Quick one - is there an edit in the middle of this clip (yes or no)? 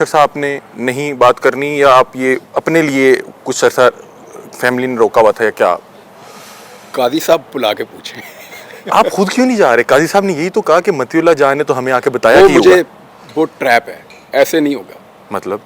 no